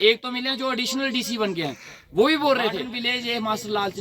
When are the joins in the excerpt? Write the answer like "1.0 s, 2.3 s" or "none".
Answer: 2.9 s